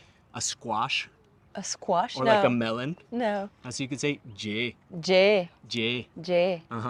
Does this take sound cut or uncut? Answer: uncut